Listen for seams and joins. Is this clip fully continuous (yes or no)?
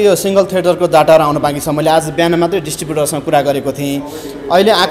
yes